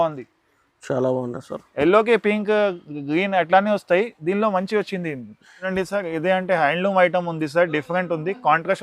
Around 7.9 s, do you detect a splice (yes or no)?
no